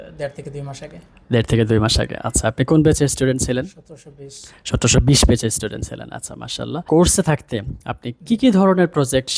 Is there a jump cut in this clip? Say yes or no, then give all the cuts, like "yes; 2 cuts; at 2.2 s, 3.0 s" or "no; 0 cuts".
no; 0 cuts